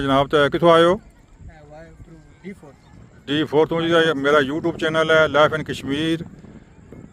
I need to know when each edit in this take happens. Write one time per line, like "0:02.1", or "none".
none